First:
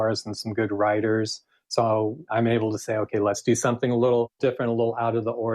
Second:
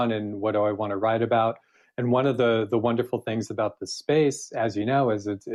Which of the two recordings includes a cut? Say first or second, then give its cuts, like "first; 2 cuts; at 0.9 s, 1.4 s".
first; 3 cuts; at 2.2 s, 3.4 s, 4.4 s